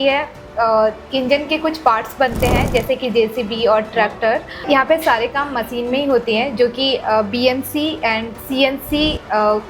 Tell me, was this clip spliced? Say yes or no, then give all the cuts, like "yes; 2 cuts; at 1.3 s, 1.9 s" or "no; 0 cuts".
no; 0 cuts